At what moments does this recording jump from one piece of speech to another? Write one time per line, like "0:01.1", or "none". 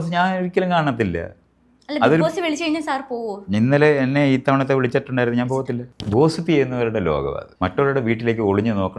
0:05.9
0:07.5